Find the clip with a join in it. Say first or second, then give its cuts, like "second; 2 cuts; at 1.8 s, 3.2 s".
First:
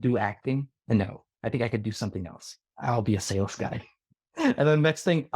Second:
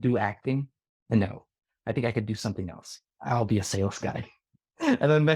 first; 1 cut; at 1.0 s